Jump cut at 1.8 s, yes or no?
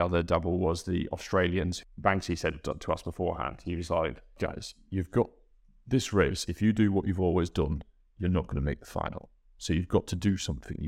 yes